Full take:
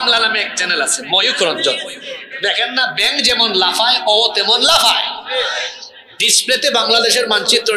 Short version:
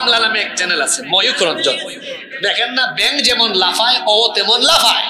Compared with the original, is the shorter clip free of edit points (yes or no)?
yes